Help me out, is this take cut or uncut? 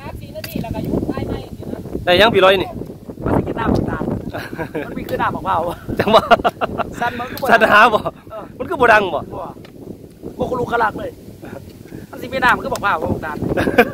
uncut